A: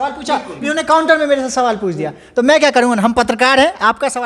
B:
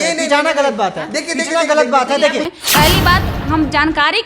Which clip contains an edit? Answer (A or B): B